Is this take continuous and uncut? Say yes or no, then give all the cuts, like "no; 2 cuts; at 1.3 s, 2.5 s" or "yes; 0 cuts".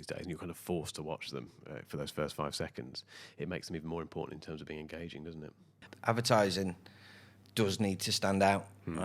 no; 1 cut; at 5.8 s